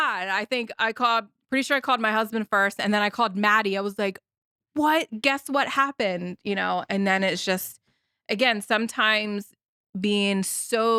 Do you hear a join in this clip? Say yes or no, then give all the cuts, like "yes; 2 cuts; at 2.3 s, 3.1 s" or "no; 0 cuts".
no; 0 cuts